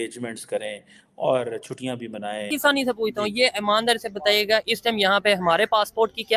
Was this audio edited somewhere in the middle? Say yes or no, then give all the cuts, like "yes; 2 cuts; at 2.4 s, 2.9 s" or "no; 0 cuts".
yes; 1 cut; at 2.5 s